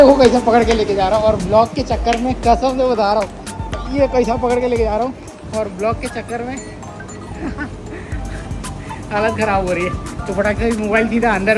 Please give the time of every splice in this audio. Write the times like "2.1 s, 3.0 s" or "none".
none